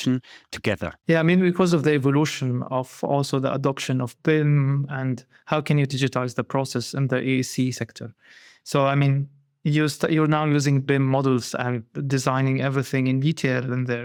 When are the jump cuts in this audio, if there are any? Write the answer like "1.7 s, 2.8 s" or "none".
none